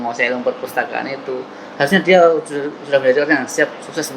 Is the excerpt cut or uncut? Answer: uncut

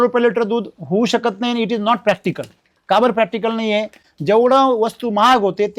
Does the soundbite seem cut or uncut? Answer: uncut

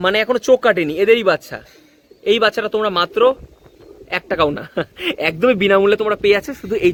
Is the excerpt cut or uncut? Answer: uncut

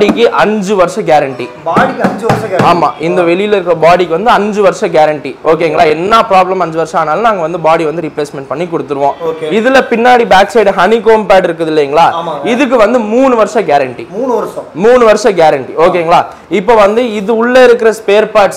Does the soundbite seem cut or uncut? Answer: uncut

